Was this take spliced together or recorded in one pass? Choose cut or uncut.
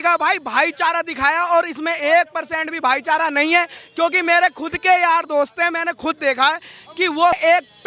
uncut